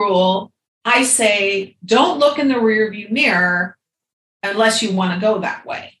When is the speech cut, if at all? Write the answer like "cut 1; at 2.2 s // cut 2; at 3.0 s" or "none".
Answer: none